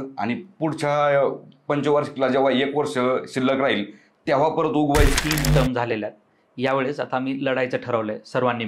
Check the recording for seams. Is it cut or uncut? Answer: cut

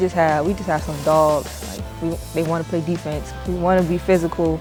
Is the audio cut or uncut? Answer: uncut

